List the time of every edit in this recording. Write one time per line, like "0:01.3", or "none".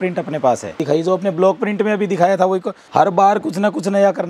0:00.8
0:02.8